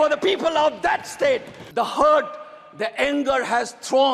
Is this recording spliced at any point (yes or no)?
yes